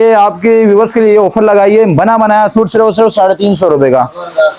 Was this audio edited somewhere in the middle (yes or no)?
no